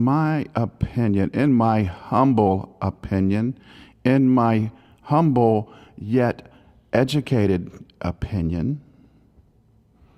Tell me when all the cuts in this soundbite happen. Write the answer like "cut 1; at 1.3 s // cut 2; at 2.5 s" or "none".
cut 1; at 8.5 s